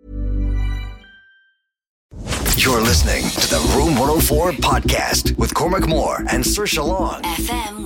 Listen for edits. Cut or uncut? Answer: cut